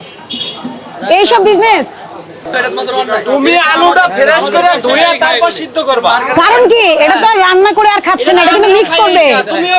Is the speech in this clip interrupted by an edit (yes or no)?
yes